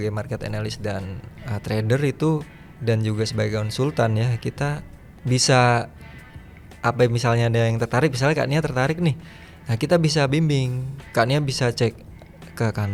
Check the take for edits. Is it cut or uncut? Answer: uncut